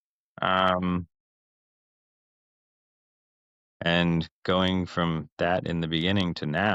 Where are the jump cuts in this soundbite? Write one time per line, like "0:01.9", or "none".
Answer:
none